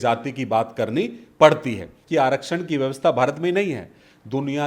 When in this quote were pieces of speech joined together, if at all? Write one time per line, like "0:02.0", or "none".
0:02.0